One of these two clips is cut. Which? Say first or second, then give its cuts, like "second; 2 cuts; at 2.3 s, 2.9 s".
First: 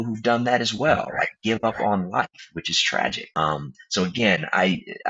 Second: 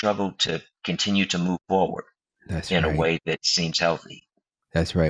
first; 1 cut; at 3.2 s